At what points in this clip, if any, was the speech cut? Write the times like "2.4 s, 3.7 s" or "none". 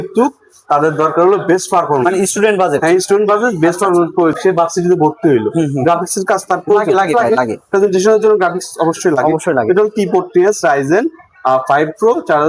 none